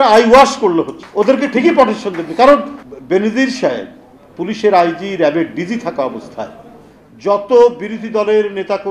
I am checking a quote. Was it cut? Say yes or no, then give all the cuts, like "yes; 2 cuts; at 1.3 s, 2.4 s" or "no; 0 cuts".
yes; 2 cuts; at 1.0 s, 2.8 s